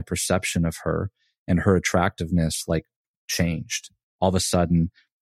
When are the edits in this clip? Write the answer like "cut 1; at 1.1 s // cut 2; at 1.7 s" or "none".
none